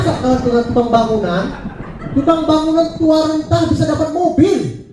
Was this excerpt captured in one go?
yes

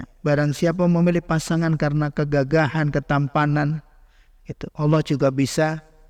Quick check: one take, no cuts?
yes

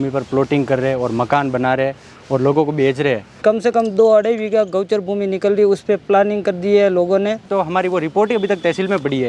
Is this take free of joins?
no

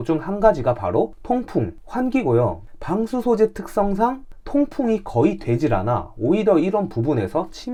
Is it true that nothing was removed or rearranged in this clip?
yes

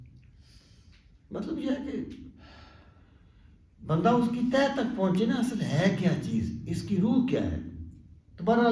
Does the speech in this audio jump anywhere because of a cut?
no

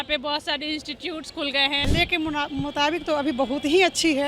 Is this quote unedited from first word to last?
no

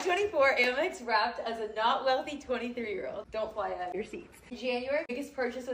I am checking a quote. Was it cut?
no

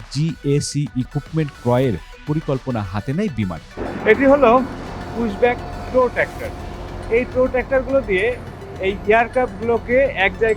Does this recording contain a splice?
yes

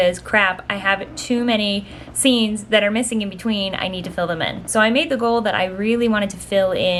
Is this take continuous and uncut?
yes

